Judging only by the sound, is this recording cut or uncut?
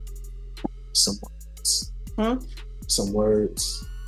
uncut